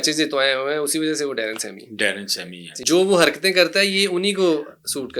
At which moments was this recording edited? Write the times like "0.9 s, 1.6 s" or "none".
2.7 s